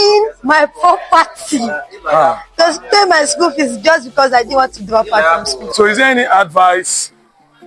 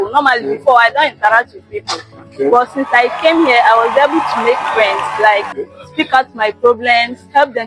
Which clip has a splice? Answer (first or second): first